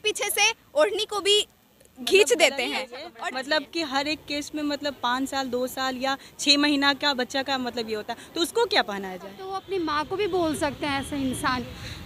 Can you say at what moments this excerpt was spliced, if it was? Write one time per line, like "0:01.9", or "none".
0:03.0
0:09.5